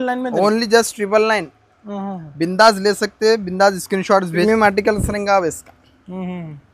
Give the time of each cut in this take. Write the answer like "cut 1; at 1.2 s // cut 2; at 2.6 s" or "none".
cut 1; at 4.4 s